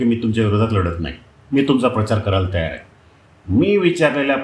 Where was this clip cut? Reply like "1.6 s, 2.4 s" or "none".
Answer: none